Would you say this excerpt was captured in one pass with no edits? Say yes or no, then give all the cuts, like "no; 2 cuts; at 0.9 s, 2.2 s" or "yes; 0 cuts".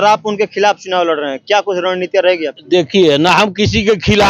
yes; 0 cuts